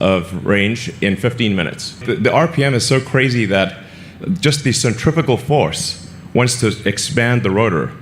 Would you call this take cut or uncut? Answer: cut